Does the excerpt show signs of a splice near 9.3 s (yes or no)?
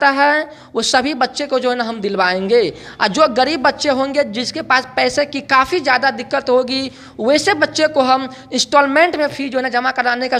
no